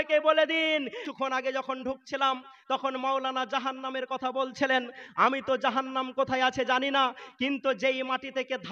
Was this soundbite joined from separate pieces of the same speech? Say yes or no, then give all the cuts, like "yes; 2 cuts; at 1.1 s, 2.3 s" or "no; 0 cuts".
yes; 1 cut; at 1.0 s